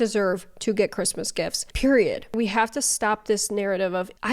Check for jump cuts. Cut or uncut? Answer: cut